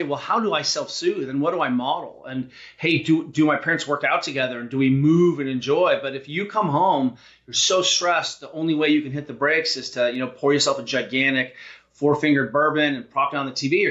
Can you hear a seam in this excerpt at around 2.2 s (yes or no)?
no